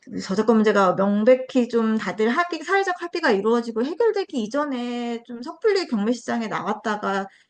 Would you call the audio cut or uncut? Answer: uncut